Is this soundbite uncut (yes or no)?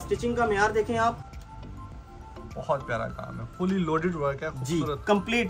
no